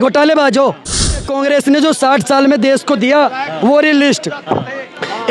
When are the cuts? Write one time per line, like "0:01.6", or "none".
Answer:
0:01.3